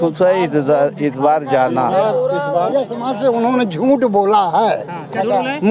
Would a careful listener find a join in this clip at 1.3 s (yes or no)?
no